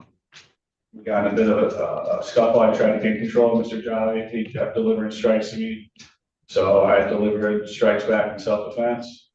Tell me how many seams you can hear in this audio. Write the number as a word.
zero